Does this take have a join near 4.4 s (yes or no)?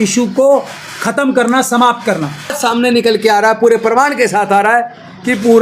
no